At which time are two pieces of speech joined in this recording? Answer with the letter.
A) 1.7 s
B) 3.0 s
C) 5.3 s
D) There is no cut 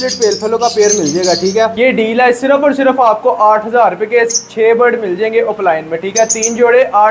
A